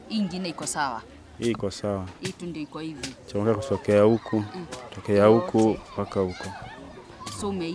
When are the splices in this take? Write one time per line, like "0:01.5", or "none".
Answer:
none